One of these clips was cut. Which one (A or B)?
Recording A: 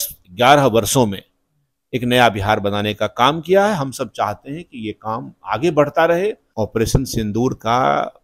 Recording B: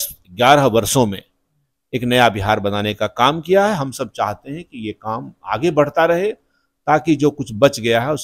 A